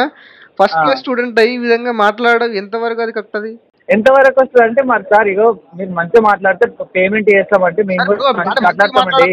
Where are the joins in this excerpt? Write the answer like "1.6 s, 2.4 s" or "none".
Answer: none